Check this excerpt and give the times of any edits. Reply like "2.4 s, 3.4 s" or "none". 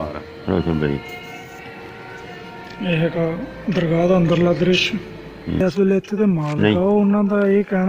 5.6 s